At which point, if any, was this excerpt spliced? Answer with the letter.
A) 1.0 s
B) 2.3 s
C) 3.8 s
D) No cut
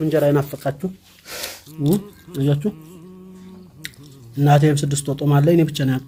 D